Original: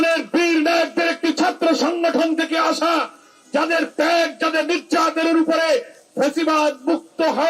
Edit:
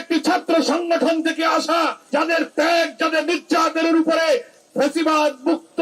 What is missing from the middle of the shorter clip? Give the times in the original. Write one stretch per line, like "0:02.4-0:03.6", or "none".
0:03.1-0:03.4